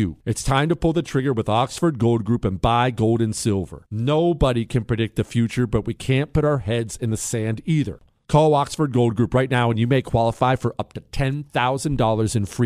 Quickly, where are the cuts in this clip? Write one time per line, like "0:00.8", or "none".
0:08.0

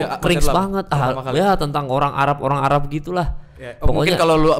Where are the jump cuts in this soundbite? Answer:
none

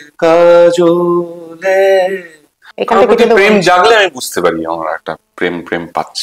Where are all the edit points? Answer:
0:02.7

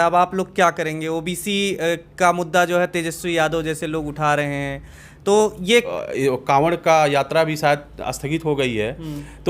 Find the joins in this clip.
0:05.9

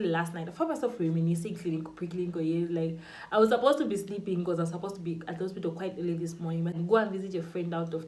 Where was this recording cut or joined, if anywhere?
0:06.7

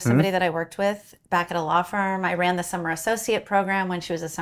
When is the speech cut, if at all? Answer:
none

